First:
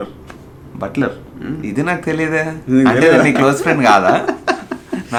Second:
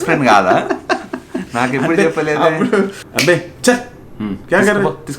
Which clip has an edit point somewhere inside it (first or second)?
second